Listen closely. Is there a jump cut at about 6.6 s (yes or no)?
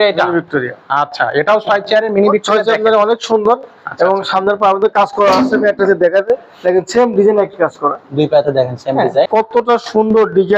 no